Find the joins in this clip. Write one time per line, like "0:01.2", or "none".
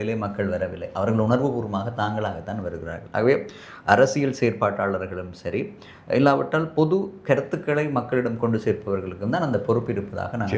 none